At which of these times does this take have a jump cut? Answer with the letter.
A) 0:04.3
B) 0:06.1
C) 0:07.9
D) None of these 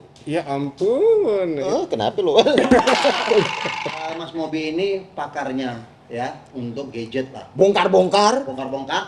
A